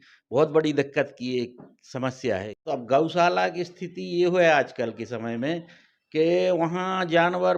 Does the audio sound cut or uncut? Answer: cut